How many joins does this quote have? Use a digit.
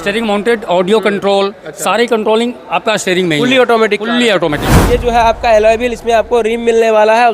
1